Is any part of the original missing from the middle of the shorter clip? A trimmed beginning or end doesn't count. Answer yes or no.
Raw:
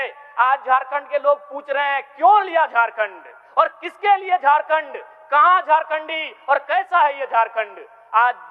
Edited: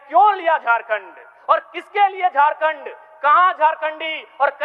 no